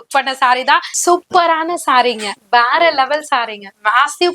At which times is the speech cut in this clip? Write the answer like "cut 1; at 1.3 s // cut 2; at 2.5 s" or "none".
cut 1; at 0.9 s